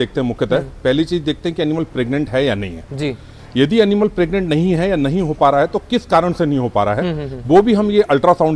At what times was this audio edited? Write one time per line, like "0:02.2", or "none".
none